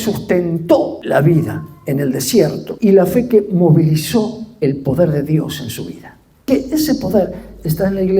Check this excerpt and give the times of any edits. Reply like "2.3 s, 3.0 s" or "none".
1.0 s, 2.7 s, 6.5 s

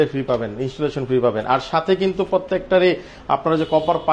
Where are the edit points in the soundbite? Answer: none

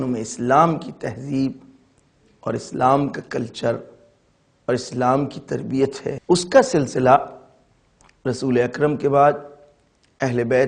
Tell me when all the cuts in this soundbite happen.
6.1 s

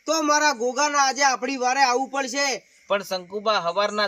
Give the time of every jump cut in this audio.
2.7 s

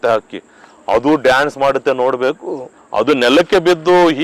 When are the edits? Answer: 2.7 s

